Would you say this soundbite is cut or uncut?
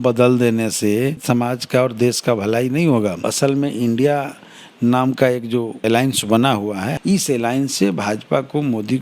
cut